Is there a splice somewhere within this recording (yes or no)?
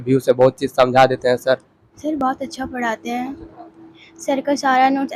yes